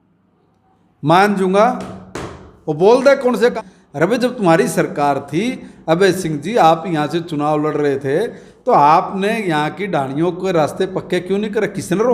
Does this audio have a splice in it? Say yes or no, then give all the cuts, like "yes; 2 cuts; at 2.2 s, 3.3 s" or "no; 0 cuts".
yes; 1 cut; at 3.6 s